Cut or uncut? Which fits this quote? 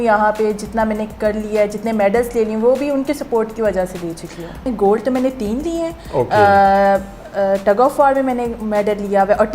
cut